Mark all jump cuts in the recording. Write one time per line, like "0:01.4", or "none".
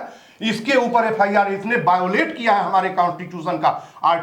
none